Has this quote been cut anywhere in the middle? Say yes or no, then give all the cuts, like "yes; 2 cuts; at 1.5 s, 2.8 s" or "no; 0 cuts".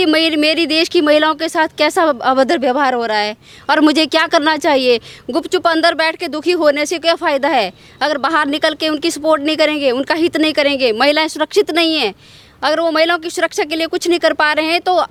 no; 0 cuts